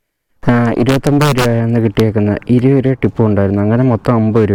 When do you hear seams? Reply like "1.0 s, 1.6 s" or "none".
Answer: none